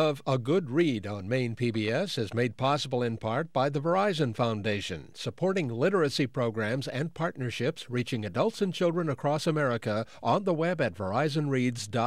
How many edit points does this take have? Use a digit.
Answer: 0